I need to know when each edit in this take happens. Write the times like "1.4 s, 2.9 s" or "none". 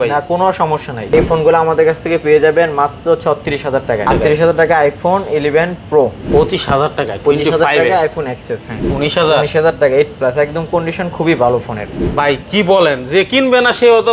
1.1 s, 4.0 s, 6.2 s, 8.8 s, 11.9 s